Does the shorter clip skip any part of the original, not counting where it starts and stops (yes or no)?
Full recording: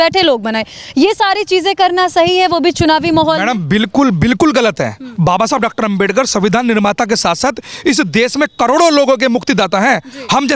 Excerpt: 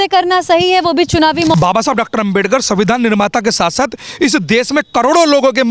yes